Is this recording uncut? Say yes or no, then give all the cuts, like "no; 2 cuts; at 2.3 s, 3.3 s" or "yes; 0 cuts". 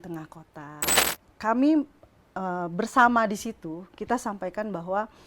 no; 1 cut; at 1.0 s